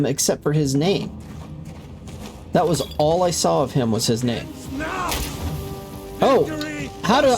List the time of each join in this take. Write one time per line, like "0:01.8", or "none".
0:04.6